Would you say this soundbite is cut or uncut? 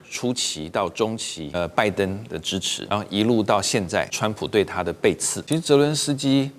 cut